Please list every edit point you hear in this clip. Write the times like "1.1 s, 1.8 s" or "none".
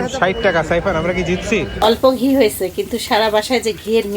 1.7 s